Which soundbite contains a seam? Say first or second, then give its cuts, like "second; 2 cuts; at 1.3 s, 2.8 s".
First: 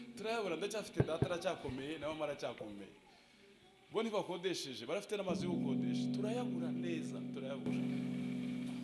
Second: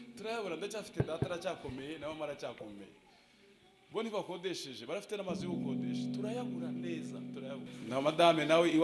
second; 1 cut; at 7.6 s